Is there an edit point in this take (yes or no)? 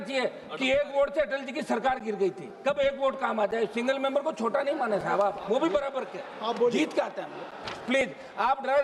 no